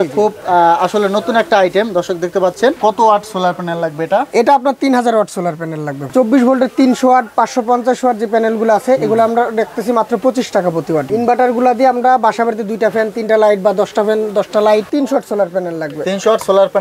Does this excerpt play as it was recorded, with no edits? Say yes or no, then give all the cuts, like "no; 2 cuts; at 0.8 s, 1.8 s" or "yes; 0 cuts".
no; 4 cuts; at 2.8 s, 6.1 s, 11.1 s, 14.9 s